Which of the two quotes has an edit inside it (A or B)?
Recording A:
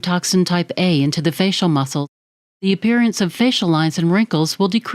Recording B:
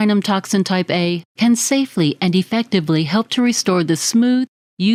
A